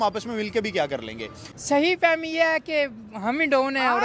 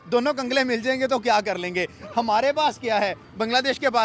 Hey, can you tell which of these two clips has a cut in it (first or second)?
first